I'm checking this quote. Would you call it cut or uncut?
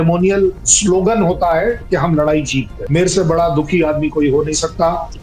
cut